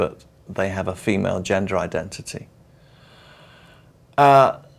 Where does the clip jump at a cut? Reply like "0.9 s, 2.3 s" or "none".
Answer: none